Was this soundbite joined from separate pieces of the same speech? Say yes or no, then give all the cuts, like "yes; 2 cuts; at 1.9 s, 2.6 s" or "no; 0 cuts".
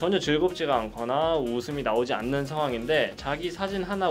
no; 0 cuts